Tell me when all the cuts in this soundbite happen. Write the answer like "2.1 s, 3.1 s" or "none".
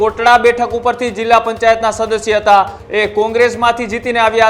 2.8 s